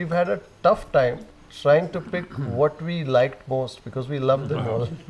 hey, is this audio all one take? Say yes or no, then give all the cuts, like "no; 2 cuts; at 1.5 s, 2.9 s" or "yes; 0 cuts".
yes; 0 cuts